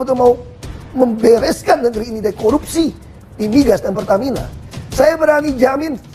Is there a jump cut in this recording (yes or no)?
no